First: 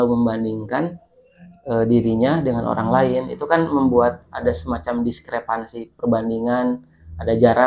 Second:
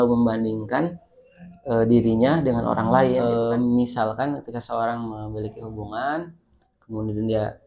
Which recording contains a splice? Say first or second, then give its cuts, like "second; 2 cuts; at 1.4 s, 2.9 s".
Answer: second; 1 cut; at 3.2 s